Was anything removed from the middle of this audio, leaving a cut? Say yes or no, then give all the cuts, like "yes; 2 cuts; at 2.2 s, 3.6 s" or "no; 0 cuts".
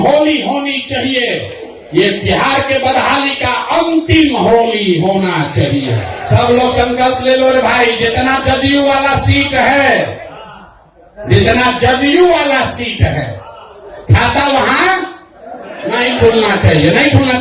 yes; 1 cut; at 6.1 s